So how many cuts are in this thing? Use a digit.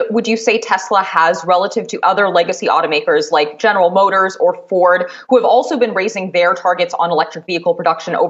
0